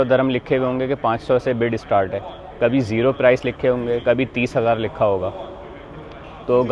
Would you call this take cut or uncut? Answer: uncut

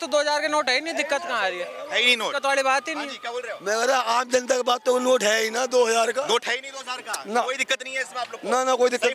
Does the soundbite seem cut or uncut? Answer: uncut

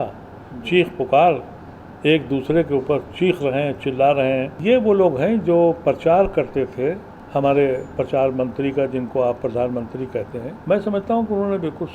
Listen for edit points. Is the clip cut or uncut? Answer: cut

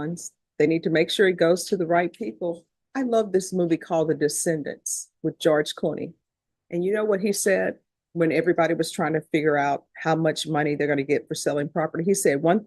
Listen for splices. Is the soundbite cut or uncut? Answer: cut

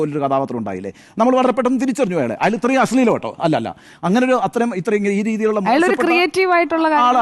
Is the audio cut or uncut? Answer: uncut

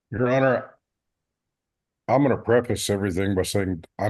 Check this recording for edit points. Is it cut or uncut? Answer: uncut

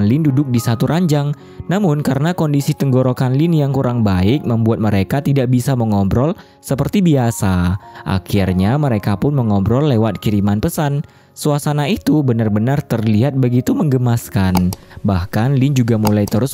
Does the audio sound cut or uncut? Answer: uncut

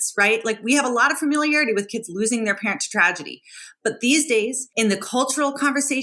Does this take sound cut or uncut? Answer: cut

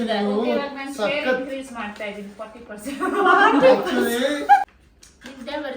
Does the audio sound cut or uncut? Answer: cut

